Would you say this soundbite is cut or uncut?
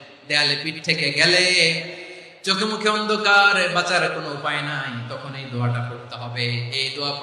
uncut